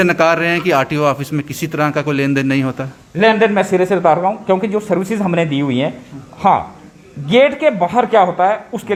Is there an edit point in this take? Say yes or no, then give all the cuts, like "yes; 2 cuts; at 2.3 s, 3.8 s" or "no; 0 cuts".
no; 0 cuts